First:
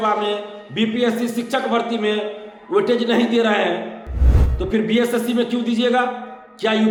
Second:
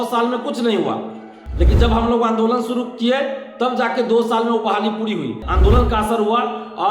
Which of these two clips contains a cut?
second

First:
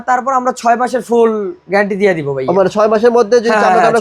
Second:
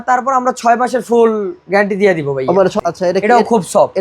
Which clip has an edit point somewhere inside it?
second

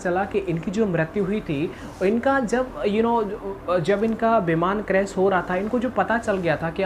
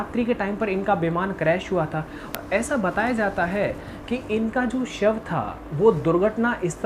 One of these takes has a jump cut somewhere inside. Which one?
second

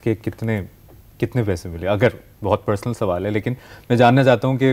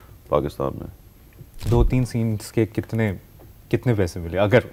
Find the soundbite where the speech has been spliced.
second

